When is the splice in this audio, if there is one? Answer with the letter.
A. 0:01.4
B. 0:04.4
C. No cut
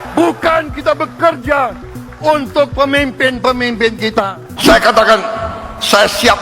B